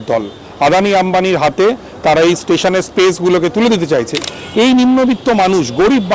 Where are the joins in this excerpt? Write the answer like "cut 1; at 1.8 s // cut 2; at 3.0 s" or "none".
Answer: cut 1; at 4.3 s